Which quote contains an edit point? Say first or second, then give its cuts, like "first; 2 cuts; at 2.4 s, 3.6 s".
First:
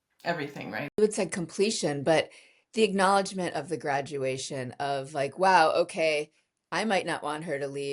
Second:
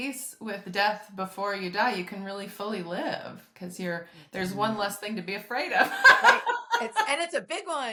first; 1 cut; at 1.0 s